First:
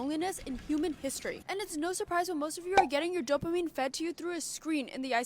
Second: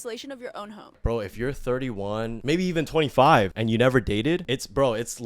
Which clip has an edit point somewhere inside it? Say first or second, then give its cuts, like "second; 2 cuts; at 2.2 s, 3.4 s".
second; 4 cuts; at 1.0 s, 2.4 s, 3.6 s, 4.4 s